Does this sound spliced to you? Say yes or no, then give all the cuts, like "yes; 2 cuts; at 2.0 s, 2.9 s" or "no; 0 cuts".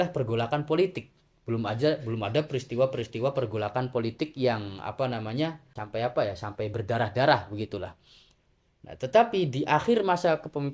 yes; 1 cut; at 5.8 s